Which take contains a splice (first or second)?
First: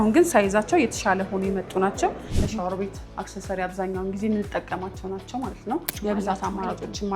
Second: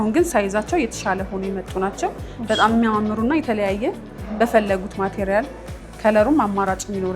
first